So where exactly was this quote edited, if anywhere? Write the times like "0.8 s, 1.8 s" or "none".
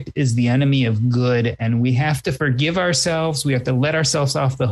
2.4 s